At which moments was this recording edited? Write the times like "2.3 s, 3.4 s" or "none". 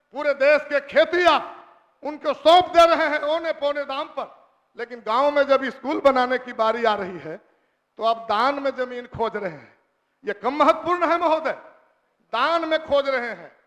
none